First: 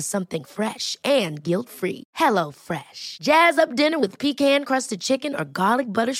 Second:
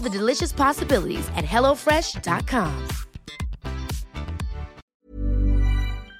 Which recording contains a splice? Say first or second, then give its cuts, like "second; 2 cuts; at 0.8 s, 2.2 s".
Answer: second; 1 cut; at 4.8 s